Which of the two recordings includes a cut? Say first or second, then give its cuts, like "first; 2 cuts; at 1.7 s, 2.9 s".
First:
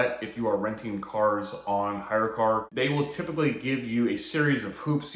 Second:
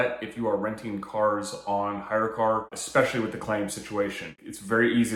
first; 1 cut; at 2.7 s